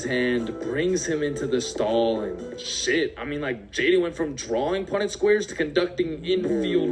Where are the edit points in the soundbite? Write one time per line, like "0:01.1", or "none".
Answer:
none